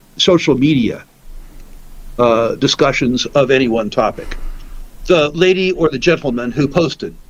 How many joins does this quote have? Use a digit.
0